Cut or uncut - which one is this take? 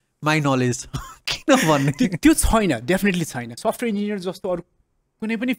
cut